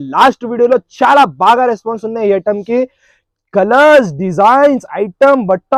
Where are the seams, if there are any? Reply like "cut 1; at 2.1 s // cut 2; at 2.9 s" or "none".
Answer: none

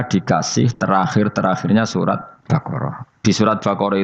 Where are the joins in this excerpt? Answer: cut 1; at 2.3 s

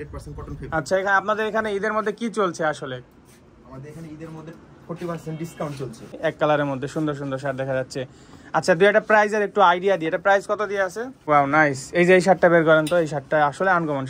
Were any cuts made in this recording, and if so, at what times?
cut 1; at 6.2 s // cut 2; at 11.1 s

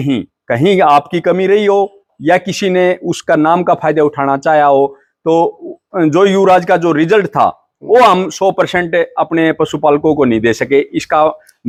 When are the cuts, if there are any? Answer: none

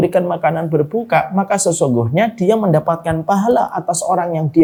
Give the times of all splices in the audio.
none

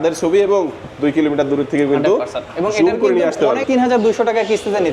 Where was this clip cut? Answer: cut 1; at 3.6 s

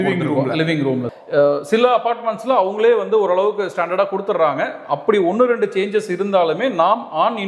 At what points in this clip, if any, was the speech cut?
cut 1; at 1.1 s

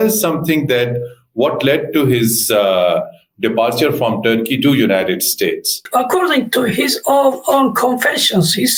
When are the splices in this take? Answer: none

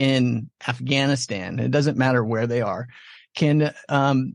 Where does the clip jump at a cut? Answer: none

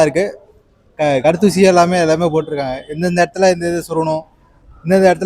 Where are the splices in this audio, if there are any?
none

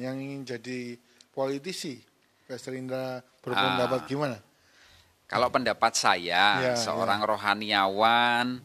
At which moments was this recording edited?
none

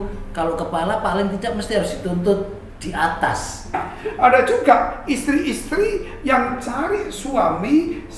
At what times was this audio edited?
cut 1; at 3.8 s

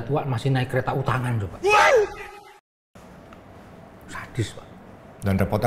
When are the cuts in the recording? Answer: none

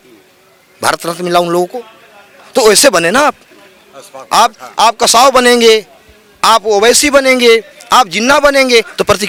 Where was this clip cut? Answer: none

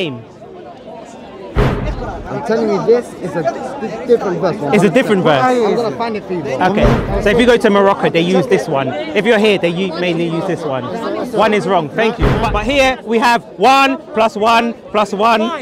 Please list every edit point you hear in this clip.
cut 1; at 1.8 s // cut 2; at 7.0 s // cut 3; at 12.4 s

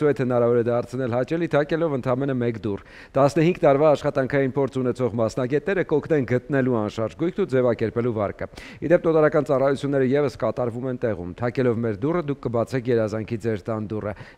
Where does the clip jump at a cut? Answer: none

